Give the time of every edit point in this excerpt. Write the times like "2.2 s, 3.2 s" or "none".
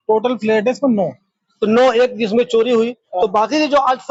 none